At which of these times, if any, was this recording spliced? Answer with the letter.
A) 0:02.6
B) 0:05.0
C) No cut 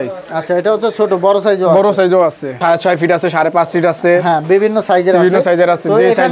A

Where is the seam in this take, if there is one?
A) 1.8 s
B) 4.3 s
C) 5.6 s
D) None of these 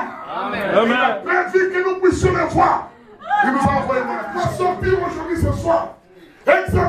B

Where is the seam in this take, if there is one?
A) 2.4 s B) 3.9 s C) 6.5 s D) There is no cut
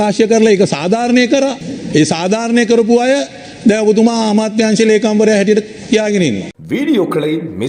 C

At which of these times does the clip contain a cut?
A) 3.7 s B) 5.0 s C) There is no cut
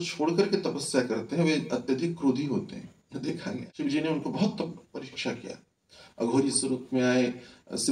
A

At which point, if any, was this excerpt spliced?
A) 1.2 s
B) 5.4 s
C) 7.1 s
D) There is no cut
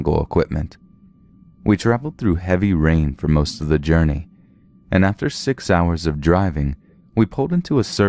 B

